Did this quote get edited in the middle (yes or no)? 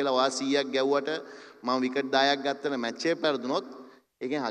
no